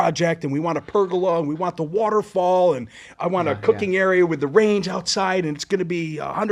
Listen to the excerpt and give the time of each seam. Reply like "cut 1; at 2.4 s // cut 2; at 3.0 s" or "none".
none